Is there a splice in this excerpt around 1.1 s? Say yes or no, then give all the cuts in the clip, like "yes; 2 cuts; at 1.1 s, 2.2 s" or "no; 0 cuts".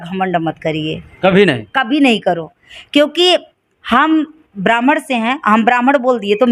no; 0 cuts